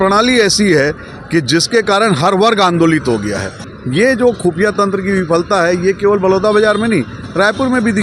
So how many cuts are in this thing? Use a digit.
1